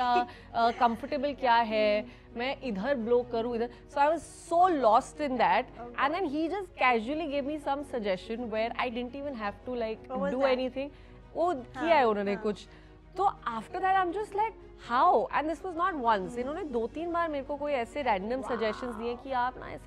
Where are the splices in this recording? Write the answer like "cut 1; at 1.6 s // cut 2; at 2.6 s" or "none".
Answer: none